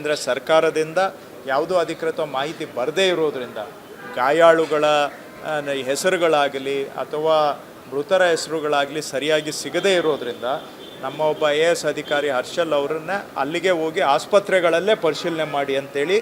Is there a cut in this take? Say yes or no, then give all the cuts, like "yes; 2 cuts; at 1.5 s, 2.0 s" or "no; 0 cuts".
no; 0 cuts